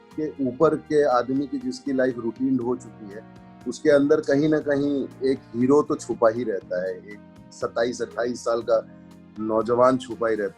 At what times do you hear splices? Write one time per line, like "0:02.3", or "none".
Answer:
none